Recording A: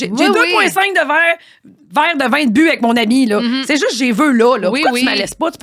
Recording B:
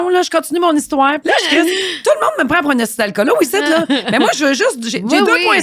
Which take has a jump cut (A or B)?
B